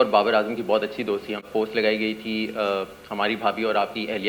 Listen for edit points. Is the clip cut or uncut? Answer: cut